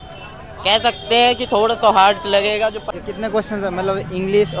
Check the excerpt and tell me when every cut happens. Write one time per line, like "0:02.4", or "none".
0:02.9